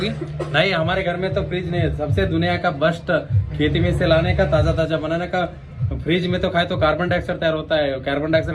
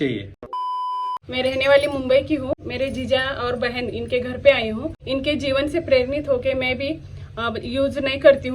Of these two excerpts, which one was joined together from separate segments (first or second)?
second